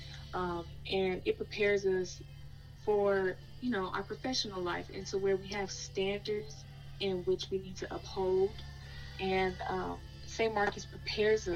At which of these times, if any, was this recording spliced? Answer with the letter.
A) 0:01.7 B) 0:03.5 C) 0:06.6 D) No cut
B